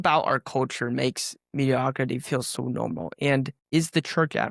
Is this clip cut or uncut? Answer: cut